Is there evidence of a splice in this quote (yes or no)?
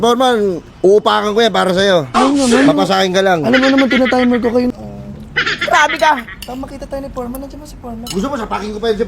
yes